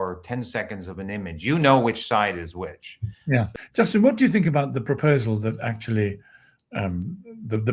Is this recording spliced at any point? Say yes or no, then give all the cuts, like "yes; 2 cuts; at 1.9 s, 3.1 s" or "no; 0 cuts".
yes; 1 cut; at 3.5 s